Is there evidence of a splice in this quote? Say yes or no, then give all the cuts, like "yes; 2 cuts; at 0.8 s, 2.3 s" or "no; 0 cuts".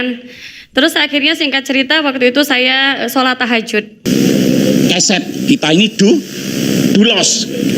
yes; 1 cut; at 3.9 s